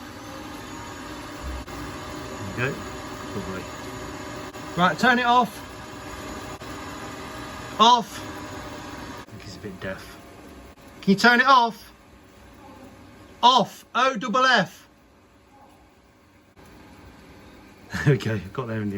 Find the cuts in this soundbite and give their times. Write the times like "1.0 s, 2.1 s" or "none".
1.7 s, 4.5 s, 6.6 s, 9.2 s, 10.8 s, 16.6 s